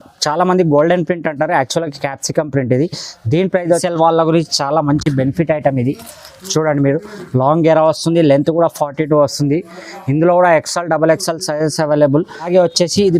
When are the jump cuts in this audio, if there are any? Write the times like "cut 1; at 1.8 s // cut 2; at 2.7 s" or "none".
cut 1; at 3.8 s // cut 2; at 12.5 s